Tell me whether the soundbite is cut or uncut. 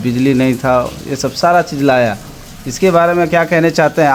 uncut